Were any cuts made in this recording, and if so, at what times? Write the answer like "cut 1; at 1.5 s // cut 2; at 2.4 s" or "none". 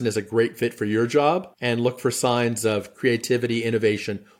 cut 1; at 1.5 s

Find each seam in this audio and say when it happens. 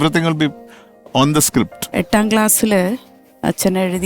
cut 1; at 1.9 s

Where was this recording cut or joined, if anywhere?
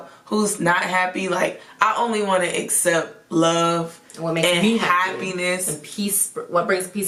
none

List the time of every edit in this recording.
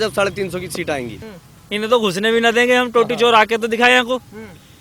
cut 1; at 1.2 s

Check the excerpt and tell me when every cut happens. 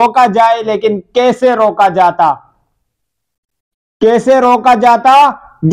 none

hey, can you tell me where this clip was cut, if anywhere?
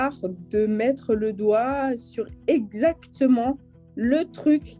none

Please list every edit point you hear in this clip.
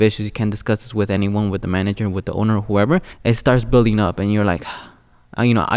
cut 1; at 3.1 s

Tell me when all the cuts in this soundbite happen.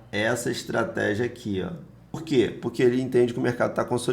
cut 1; at 2.2 s

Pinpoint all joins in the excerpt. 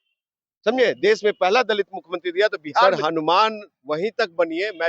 cut 1; at 2.8 s

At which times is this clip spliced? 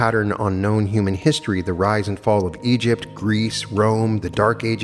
none

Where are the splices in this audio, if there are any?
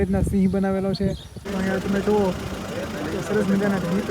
cut 1; at 1.3 s

